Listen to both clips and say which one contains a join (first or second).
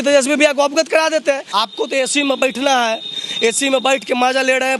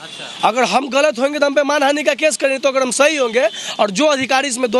first